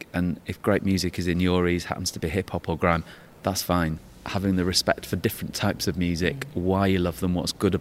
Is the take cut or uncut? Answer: cut